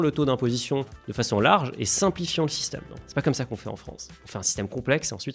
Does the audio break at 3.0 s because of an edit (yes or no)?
yes